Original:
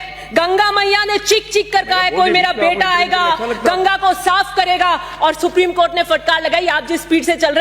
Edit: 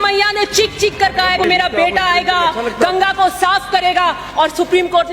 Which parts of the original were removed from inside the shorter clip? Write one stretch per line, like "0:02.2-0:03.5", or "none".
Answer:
0:02.1-0:02.3